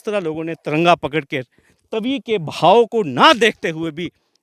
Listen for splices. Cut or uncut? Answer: uncut